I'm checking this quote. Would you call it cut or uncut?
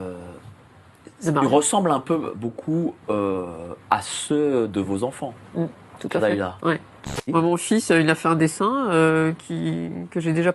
cut